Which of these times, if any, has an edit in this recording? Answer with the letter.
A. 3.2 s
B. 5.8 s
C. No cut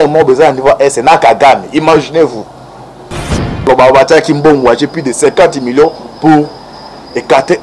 A